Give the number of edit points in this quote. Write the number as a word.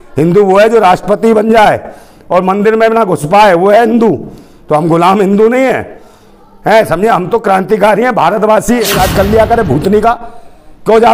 one